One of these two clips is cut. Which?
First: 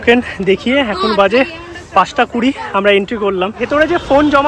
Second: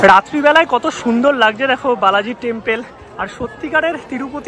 first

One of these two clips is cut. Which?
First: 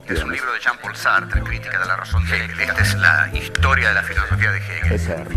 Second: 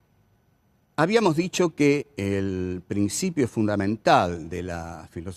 first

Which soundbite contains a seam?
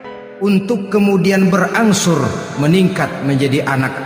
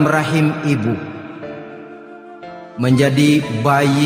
second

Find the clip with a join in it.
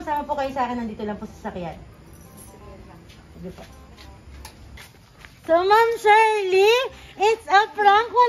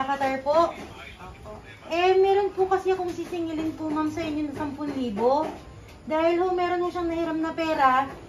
first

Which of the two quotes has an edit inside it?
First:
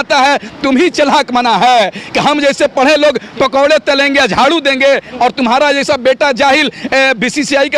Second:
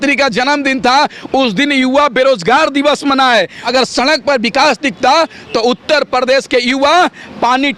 second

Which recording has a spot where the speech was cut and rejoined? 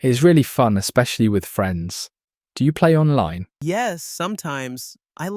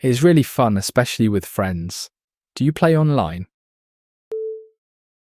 first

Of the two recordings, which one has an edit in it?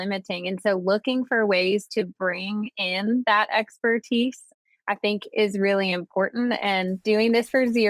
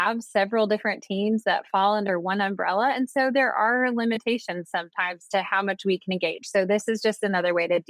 first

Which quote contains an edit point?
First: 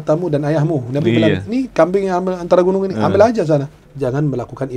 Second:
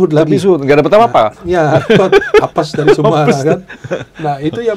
first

